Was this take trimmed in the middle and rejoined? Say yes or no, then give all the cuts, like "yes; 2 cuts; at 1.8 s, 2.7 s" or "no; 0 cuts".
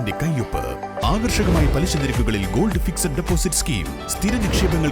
no; 0 cuts